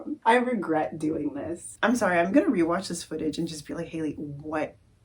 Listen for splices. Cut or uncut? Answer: cut